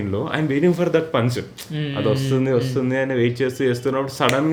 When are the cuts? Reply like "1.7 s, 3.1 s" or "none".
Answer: none